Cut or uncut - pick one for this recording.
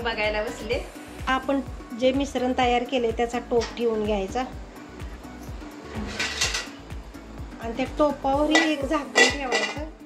cut